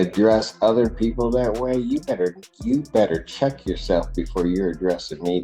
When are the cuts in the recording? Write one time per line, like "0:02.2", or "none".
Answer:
none